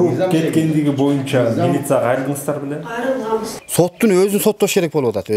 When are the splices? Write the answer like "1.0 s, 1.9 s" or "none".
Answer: 3.5 s